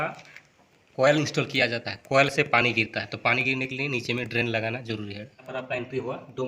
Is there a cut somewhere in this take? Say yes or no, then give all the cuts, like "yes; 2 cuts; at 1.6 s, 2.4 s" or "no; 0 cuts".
yes; 1 cut; at 5.5 s